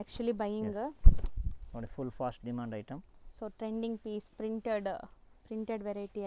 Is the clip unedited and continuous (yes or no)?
yes